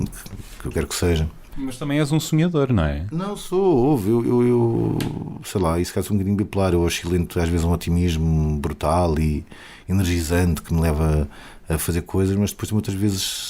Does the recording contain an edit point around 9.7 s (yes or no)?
no